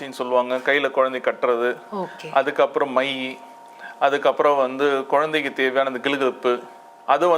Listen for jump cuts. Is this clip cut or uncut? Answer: uncut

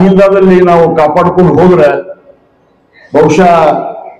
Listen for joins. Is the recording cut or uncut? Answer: uncut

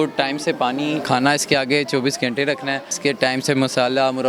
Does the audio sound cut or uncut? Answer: cut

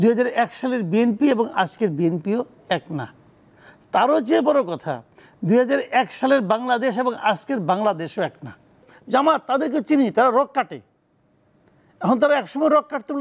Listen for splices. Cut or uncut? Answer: cut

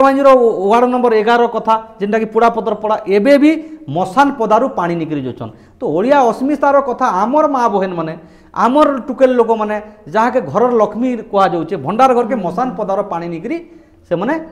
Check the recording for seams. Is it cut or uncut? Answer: uncut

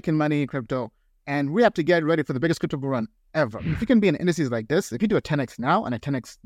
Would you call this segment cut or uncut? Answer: cut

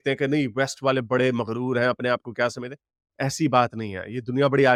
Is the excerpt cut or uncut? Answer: uncut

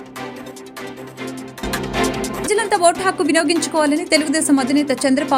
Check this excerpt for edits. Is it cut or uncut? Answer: cut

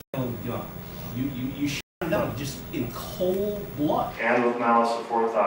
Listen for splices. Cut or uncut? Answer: cut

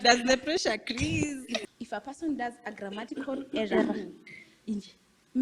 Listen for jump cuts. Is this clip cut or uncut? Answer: cut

